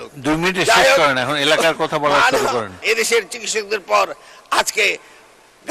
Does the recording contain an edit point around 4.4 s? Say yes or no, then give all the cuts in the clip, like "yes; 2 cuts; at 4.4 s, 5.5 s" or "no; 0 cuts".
no; 1 cut; at 2.8 s